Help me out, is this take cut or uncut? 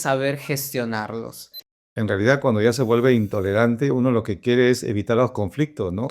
cut